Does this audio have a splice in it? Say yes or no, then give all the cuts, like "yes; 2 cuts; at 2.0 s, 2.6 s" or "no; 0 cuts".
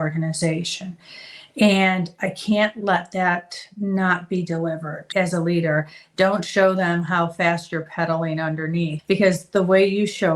yes; 3 cuts; at 2.8 s, 5.1 s, 9.0 s